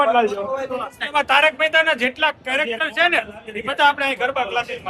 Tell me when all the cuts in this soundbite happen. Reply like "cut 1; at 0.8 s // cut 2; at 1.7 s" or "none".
cut 1; at 1.0 s